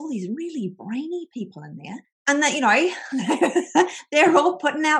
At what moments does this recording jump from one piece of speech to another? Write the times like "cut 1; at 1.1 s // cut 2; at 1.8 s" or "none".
none